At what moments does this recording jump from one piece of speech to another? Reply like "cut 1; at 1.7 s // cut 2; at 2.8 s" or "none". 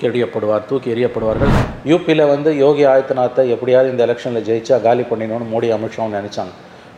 cut 1; at 1.5 s